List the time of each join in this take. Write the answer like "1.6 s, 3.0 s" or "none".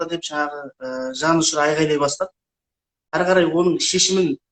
3.1 s